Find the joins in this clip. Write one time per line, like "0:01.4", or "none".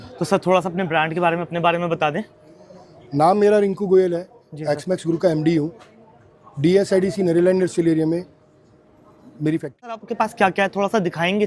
0:10.1